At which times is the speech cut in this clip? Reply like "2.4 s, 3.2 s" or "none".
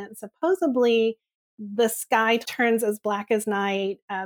2.4 s